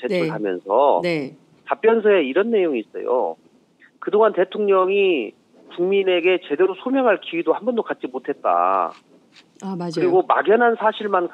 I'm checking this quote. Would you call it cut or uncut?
cut